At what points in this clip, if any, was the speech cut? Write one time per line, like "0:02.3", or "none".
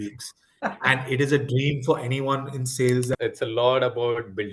0:03.1